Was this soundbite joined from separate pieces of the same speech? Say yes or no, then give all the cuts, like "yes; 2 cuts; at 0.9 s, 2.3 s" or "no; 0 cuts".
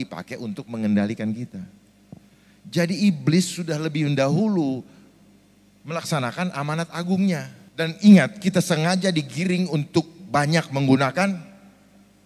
yes; 1 cut; at 7.6 s